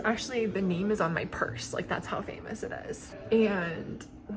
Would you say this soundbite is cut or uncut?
cut